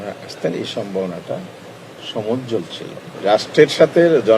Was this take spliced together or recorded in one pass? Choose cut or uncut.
cut